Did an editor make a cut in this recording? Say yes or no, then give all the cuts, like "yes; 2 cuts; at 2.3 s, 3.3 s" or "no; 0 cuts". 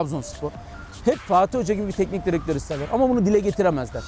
no; 0 cuts